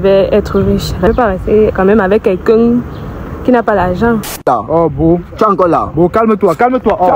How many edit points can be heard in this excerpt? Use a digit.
2